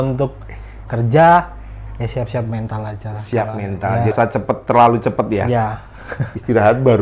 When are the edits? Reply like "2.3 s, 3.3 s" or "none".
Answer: 4.1 s